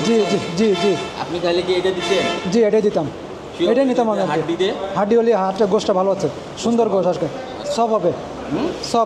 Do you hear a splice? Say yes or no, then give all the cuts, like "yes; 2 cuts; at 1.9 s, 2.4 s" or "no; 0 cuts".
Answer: no; 0 cuts